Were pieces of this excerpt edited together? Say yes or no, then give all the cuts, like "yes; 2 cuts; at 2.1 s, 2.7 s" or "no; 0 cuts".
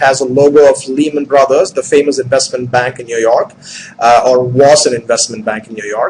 yes; 1 cut; at 1.5 s